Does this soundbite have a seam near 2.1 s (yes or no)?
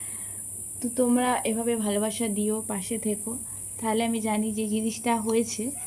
no